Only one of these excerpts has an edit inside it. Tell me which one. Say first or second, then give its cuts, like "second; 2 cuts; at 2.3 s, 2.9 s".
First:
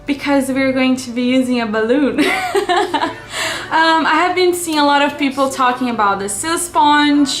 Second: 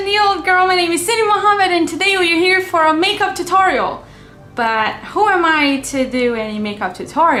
first; 1 cut; at 6.2 s